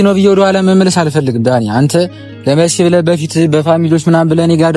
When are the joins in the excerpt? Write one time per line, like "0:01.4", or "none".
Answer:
none